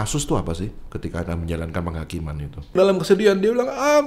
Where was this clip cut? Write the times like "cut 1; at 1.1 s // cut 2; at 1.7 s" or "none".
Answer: cut 1; at 2.8 s